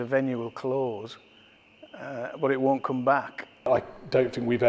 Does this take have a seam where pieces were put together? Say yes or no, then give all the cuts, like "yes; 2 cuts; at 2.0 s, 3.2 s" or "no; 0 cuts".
yes; 1 cut; at 3.7 s